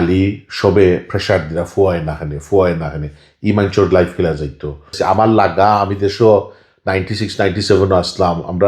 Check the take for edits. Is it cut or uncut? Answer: cut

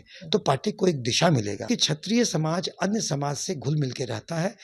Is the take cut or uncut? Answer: cut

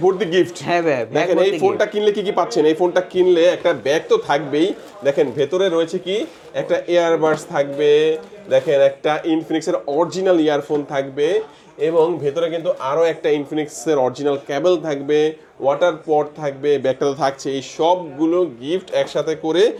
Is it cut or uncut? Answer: uncut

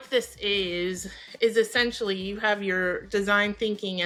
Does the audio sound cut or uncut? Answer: uncut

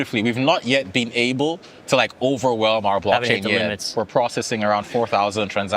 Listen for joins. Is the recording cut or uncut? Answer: cut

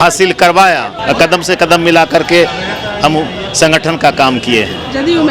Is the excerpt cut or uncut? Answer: cut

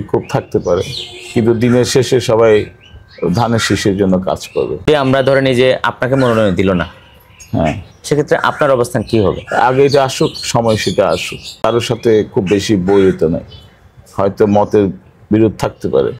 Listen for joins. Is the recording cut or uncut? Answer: cut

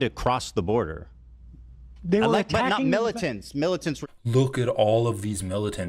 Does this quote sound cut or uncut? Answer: cut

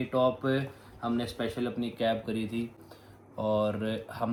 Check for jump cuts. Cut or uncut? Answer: uncut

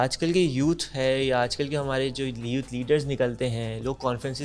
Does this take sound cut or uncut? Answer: uncut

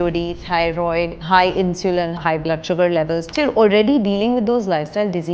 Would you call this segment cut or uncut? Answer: cut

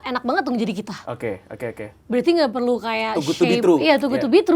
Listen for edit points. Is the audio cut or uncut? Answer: uncut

